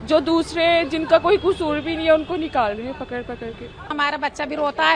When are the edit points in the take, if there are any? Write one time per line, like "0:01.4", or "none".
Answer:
0:03.9